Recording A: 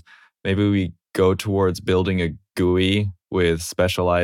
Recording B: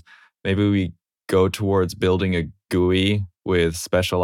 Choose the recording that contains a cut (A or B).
A